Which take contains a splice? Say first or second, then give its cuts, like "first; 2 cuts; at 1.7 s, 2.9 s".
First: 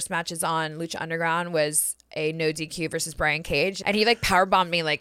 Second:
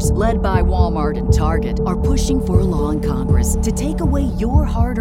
first; 1 cut; at 3.8 s